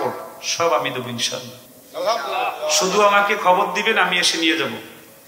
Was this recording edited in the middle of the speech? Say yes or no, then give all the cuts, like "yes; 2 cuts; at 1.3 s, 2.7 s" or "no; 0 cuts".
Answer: no; 0 cuts